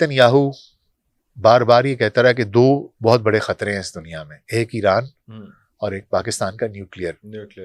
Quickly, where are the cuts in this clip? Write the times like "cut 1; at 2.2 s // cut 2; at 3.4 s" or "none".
none